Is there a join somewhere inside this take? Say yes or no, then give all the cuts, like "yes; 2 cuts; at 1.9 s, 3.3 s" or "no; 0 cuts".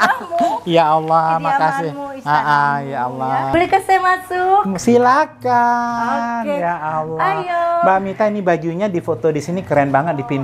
yes; 1 cut; at 3.5 s